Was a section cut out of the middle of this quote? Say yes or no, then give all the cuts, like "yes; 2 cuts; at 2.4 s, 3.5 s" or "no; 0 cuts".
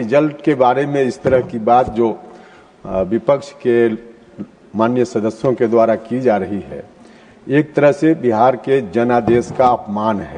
no; 0 cuts